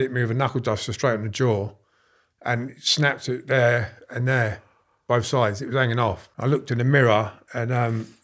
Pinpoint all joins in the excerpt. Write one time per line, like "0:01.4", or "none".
0:06.3